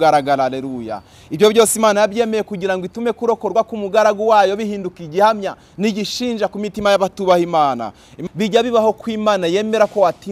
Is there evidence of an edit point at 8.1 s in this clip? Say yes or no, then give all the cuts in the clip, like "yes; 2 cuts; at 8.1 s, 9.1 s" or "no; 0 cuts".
yes; 1 cut; at 8.1 s